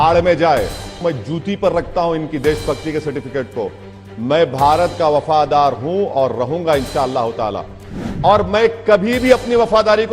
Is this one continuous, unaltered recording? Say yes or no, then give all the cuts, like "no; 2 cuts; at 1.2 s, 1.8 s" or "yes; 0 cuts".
no; 2 cuts; at 0.9 s, 8.0 s